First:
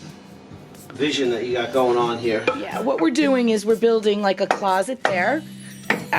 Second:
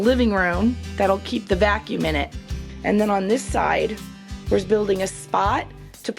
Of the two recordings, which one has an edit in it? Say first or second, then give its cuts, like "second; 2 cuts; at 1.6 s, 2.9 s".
first; 1 cut; at 2.7 s